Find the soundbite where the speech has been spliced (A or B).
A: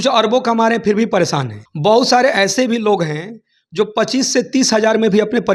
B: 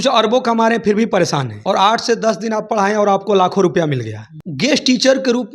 B